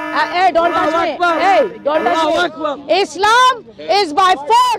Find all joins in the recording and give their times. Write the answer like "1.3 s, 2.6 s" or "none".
2.7 s